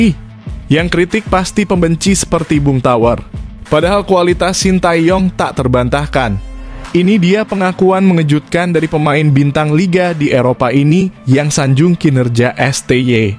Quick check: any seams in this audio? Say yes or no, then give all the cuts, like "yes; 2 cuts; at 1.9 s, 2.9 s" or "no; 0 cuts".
no; 0 cuts